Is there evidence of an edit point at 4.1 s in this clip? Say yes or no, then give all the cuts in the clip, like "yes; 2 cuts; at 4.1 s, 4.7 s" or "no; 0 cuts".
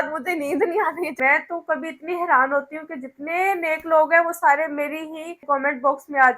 no; 2 cuts; at 1.1 s, 5.4 s